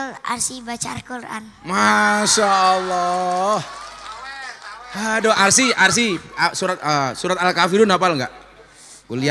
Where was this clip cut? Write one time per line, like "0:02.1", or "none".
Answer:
none